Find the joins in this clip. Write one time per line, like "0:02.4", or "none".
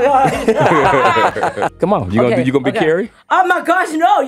0:01.7